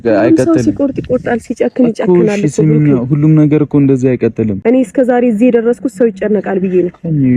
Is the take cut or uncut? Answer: cut